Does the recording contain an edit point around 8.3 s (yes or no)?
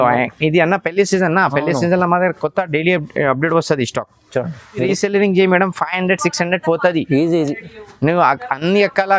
no